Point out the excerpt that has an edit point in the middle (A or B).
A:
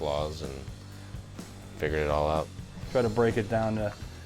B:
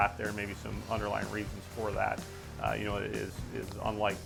A